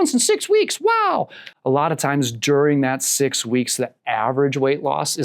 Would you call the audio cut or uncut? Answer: cut